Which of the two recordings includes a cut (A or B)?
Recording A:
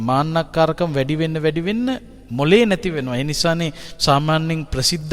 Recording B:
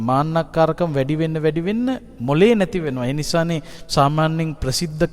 B